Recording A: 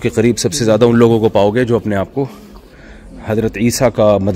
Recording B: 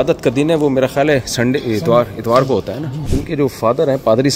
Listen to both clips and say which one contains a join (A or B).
B